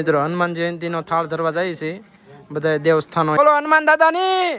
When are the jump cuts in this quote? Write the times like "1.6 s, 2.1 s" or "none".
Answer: 3.4 s